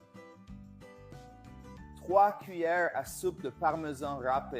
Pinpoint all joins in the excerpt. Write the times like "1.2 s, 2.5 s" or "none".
1.0 s